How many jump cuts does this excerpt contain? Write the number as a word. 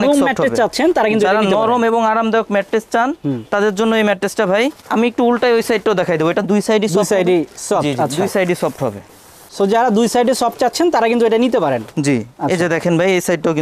zero